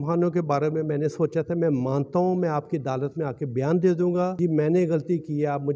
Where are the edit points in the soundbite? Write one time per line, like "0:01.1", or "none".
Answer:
0:04.3

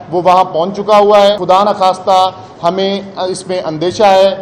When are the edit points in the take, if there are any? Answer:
0:01.4

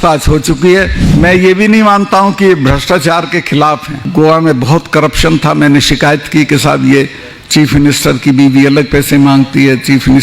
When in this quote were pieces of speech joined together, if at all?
0:01.0
0:04.0

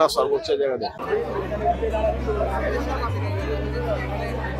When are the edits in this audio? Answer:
0:01.0

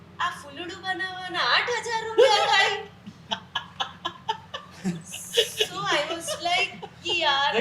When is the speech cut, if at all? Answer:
none

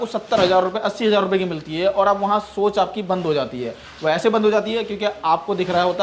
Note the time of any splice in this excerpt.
none

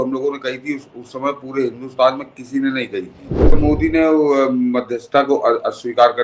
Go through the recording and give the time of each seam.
0:03.6

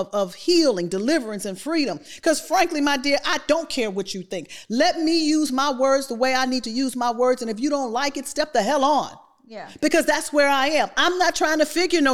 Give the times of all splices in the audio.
none

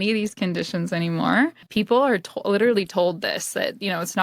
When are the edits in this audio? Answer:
0:01.6

